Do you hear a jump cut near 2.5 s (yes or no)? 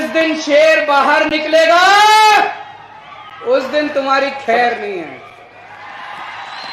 no